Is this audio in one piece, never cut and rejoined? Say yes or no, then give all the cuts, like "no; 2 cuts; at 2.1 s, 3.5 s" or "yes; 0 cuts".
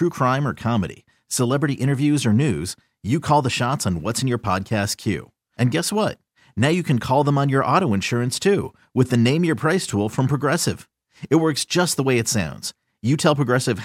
yes; 0 cuts